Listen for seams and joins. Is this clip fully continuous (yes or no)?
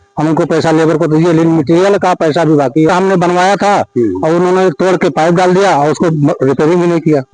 no